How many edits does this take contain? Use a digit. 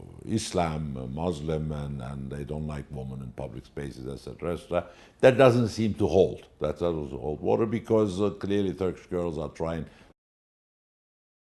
0